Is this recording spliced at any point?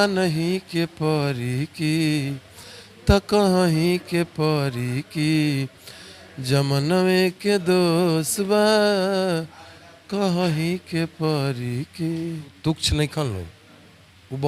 yes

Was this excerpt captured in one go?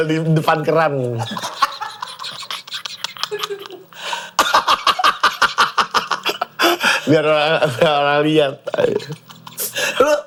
yes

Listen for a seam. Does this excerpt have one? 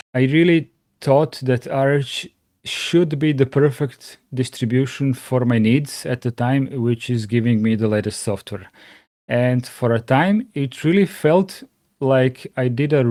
no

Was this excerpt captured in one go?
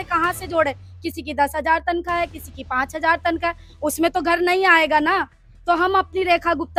yes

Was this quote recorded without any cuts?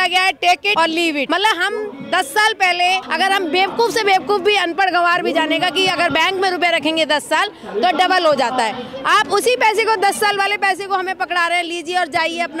no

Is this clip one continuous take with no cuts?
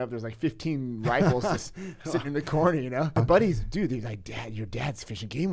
no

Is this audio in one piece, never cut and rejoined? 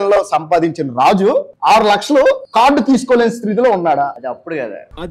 no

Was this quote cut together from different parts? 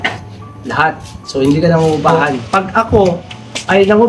yes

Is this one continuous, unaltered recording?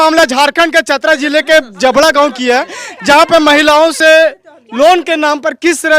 yes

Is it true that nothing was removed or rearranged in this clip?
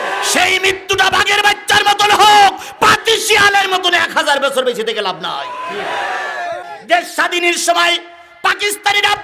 no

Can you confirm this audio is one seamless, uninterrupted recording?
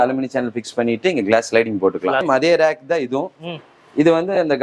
no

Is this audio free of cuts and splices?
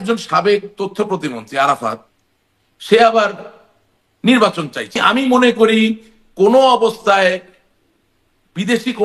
no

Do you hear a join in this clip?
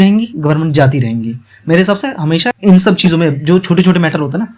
yes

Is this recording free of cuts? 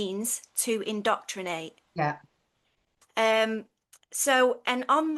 yes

